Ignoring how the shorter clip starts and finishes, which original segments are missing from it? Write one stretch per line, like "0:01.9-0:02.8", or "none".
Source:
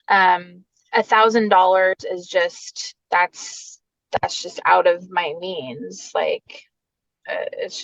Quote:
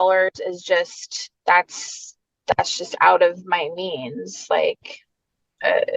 none